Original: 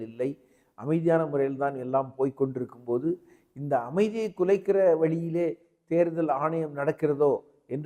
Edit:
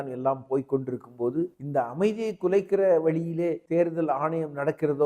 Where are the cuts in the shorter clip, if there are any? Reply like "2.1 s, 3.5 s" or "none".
1.6 s, 3.6 s